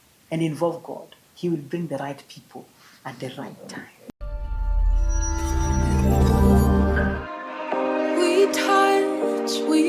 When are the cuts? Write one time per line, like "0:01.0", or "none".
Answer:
0:03.9